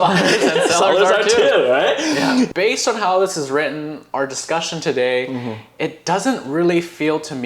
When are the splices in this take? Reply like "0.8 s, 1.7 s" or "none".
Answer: 2.5 s